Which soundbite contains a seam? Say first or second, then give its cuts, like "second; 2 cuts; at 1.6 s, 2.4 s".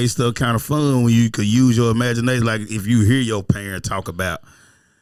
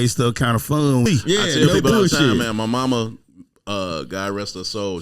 second; 1 cut; at 1.0 s